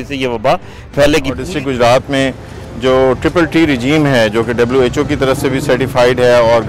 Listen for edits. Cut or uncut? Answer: cut